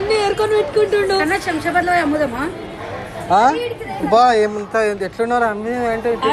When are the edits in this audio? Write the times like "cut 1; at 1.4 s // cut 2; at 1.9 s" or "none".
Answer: none